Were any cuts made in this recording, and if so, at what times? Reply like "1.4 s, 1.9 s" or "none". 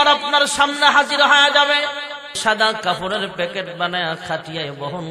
2.4 s